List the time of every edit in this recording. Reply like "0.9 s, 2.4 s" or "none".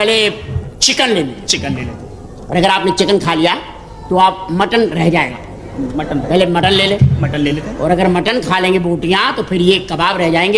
none